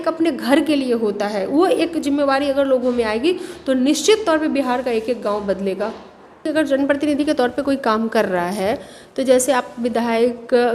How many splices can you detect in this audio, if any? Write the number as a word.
one